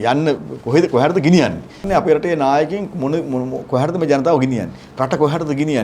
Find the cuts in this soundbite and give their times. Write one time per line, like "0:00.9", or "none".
0:01.8